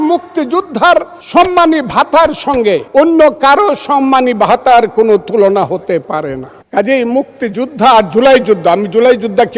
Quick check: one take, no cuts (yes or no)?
no